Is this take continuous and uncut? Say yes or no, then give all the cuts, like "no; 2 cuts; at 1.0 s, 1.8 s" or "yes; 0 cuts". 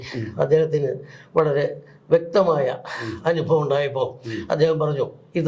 yes; 0 cuts